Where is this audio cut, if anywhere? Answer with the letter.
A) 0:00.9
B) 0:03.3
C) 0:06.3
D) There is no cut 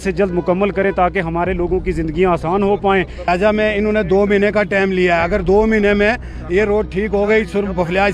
B